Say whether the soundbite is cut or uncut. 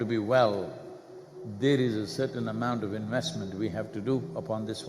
cut